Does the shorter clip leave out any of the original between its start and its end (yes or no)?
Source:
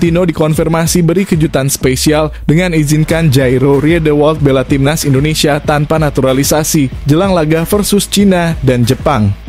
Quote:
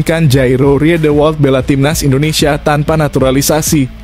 no